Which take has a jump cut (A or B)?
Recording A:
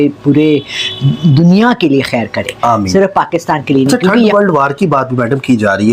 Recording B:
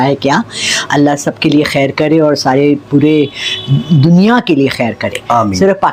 A